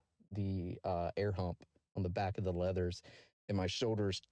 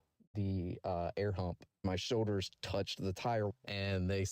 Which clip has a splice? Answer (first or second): second